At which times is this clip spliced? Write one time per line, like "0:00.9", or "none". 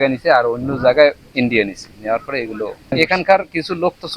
0:02.9